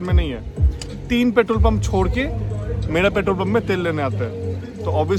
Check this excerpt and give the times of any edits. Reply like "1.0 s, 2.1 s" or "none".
none